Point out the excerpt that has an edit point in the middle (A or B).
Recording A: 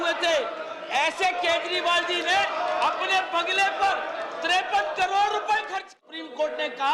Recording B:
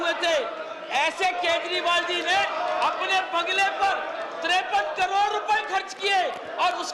A